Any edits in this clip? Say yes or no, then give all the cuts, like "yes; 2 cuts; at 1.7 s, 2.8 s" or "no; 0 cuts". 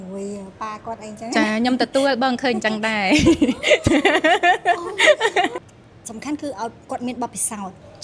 yes; 1 cut; at 5.7 s